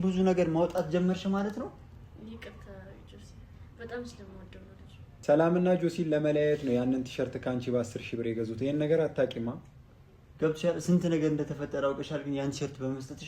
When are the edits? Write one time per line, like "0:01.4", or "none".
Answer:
0:05.0